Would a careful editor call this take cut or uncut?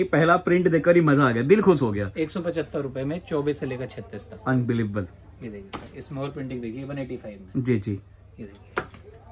uncut